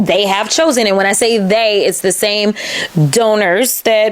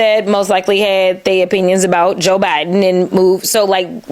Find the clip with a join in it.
first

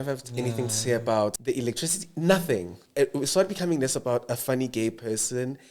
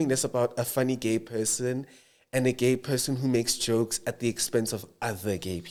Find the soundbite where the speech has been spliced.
first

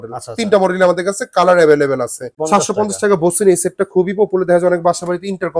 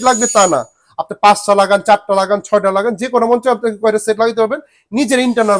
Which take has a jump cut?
first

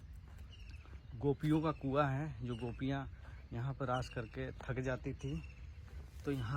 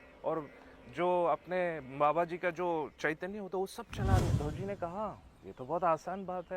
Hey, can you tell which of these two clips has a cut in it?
second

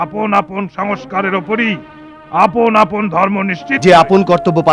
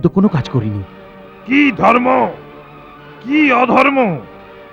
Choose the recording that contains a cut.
first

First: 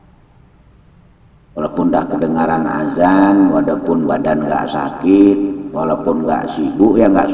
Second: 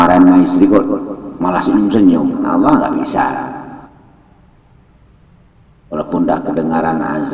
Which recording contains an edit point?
second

